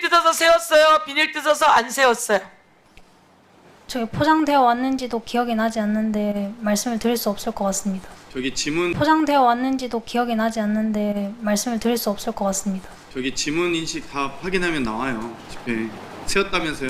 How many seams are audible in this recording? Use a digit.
1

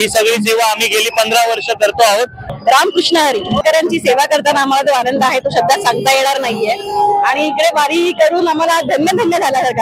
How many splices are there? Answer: 2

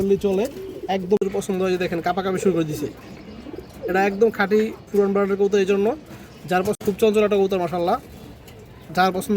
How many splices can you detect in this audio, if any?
2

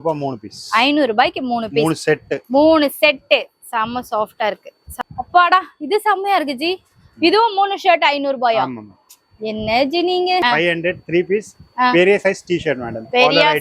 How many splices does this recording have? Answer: 2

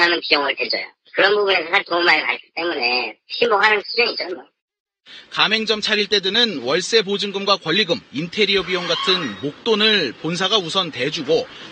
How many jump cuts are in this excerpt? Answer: 1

